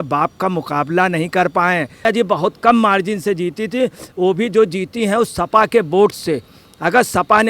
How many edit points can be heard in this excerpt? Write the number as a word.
one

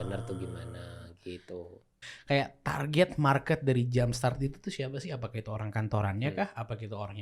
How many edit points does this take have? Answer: one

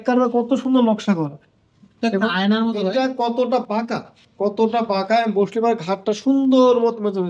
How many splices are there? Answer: zero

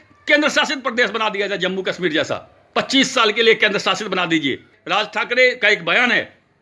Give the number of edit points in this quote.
one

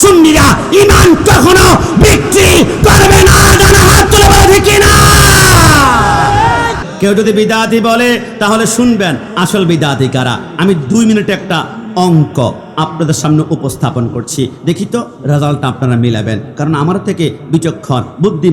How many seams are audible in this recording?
one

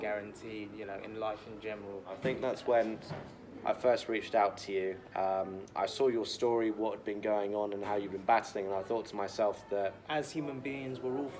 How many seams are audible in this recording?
two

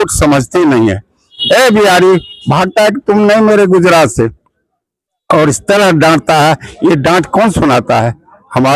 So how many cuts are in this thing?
one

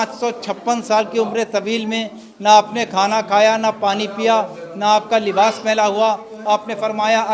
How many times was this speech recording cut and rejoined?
zero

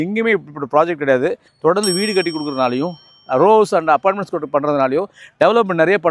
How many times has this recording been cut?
one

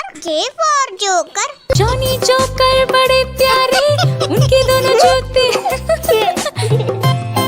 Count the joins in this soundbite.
zero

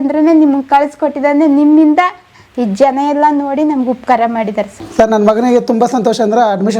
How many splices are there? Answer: one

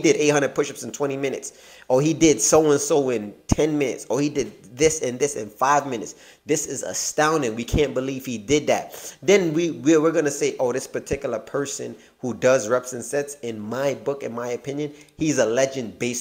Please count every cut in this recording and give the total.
zero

